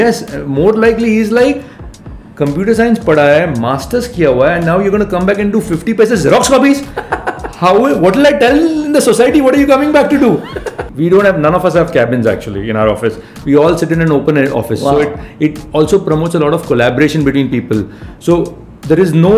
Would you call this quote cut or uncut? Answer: cut